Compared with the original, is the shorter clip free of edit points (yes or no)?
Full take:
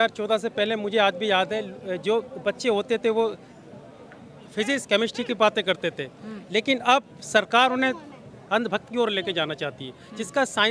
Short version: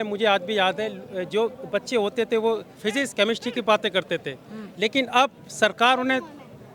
no